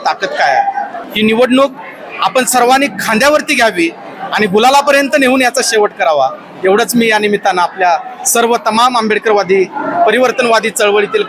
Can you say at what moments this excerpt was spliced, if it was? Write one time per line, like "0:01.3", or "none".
0:01.0